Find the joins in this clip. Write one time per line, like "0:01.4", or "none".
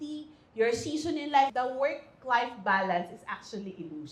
0:01.5

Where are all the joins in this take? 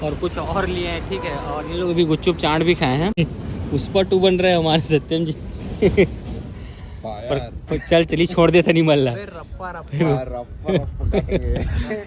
none

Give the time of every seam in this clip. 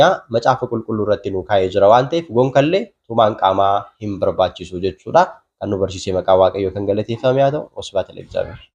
none

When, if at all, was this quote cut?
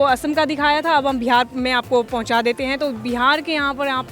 none

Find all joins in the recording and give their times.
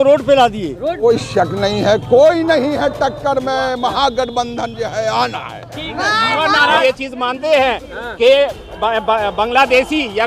0:01.0
0:06.8

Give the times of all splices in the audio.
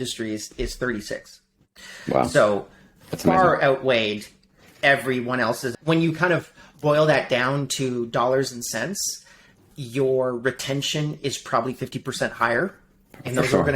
0:05.7

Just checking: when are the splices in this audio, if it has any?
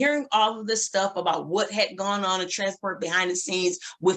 none

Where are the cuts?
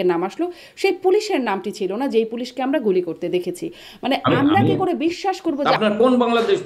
0:05.7

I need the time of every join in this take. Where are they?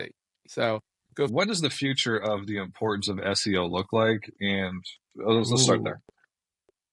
0:01.3

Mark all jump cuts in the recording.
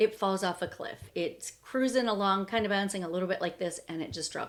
none

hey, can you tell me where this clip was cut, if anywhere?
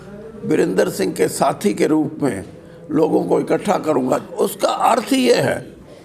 0:04.2

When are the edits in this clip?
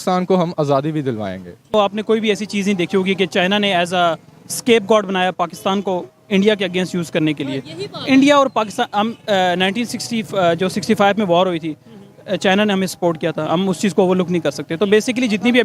0:01.7

